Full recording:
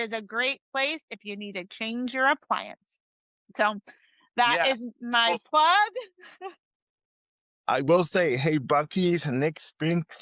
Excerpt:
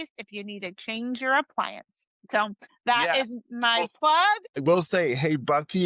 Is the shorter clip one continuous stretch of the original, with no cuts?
no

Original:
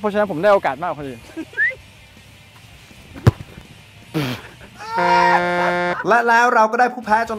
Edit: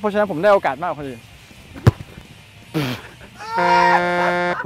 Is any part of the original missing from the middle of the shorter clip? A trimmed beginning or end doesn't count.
yes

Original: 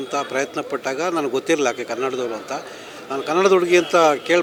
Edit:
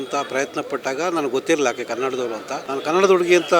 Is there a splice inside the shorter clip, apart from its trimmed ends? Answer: yes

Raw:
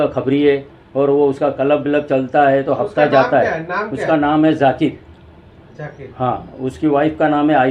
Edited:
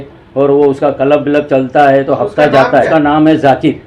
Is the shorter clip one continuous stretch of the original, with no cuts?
no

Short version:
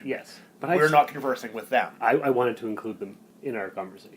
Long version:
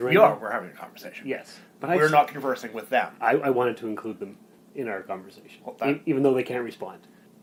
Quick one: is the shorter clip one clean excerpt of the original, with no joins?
no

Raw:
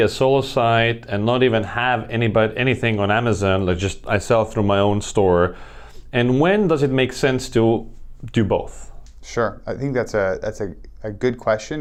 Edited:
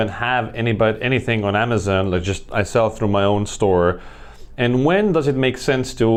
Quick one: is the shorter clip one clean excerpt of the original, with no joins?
yes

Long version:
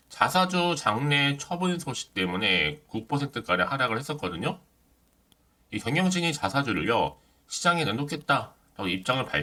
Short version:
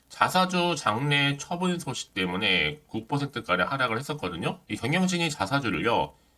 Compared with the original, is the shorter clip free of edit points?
no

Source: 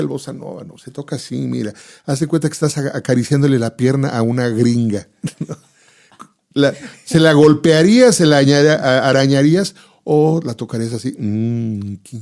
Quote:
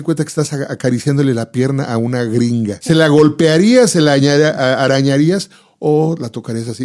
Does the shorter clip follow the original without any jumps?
no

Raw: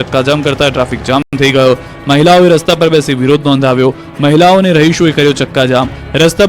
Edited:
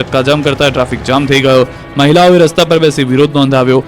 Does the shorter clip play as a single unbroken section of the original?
no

